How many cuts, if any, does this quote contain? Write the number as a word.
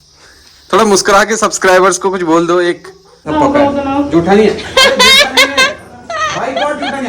one